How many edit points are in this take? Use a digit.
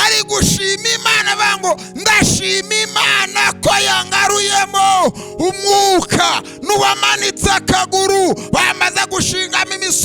0